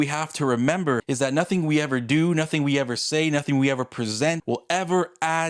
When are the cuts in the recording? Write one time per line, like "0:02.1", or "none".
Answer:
0:01.0
0:04.4